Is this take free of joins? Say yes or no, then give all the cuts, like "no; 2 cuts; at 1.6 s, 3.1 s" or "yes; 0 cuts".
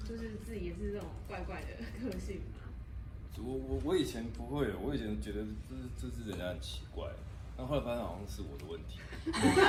yes; 0 cuts